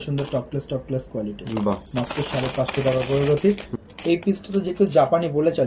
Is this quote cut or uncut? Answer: cut